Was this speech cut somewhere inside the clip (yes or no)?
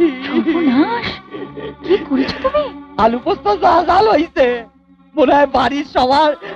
no